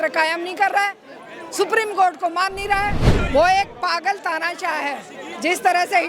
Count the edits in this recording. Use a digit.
1